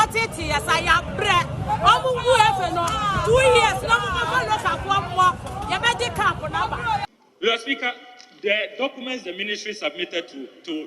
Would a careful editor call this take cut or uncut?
cut